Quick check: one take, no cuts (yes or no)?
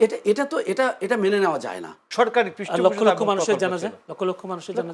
no